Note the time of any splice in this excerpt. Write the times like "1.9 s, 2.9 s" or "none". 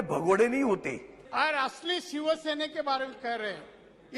1.1 s